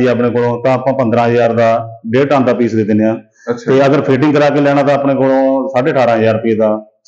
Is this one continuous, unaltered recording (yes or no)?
yes